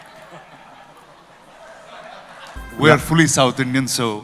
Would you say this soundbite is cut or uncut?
cut